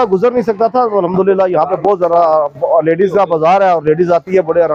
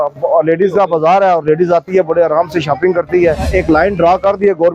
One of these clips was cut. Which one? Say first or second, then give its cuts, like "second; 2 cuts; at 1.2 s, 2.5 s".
second; 1 cut; at 3.5 s